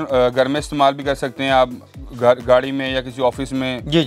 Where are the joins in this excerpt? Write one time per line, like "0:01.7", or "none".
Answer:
none